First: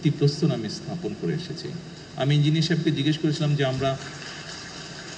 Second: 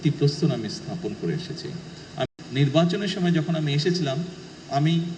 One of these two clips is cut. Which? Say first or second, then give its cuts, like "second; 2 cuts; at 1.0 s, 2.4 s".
second; 1 cut; at 2.3 s